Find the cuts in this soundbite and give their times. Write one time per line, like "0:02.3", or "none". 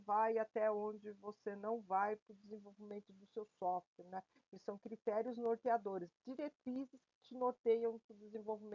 none